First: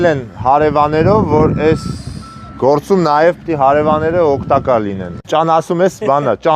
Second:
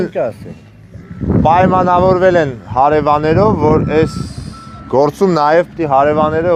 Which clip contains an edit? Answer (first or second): first